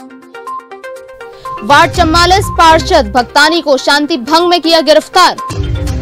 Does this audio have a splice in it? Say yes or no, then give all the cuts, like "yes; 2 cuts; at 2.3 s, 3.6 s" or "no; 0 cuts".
yes; 1 cut; at 1.1 s